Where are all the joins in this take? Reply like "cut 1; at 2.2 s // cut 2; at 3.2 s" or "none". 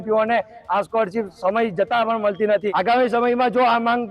cut 1; at 2.7 s